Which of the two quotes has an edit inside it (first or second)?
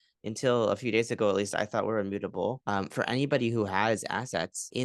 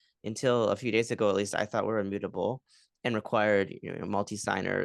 first